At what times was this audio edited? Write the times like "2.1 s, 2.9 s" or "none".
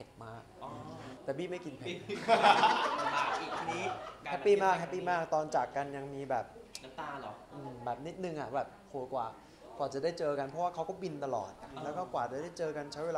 1.2 s, 4.1 s